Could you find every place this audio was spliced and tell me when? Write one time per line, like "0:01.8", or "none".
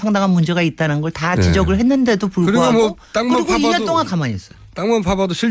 0:03.4